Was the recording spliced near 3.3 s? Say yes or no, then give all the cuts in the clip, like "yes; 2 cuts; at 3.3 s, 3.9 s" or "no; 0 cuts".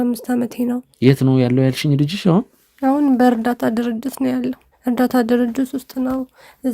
no; 2 cuts; at 0.9 s, 4.7 s